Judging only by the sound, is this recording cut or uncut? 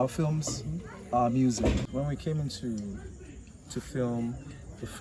cut